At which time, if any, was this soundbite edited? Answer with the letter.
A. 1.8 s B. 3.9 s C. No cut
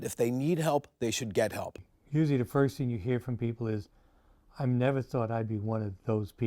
A